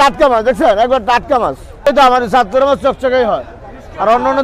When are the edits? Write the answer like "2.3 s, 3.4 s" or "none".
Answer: 1.8 s